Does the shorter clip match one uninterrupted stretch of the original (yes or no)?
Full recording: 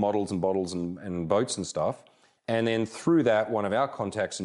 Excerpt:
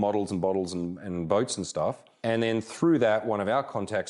no